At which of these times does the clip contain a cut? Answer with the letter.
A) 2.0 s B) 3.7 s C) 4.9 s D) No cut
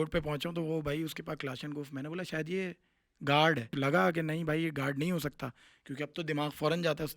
B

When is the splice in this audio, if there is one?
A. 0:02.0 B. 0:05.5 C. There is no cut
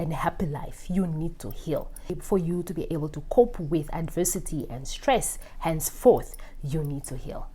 C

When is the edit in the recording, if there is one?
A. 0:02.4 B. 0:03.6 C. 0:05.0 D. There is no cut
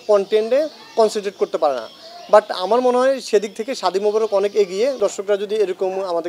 C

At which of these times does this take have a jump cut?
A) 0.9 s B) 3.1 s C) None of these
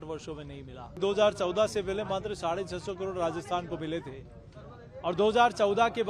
A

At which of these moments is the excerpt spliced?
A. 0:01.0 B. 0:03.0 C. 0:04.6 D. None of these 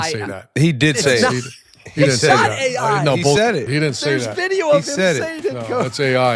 D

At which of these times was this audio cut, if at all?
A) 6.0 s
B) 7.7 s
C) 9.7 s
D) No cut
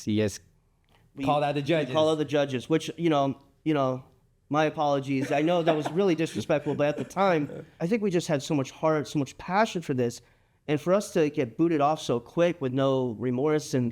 B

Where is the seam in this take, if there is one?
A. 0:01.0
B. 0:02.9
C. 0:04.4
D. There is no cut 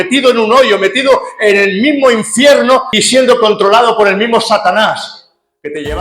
B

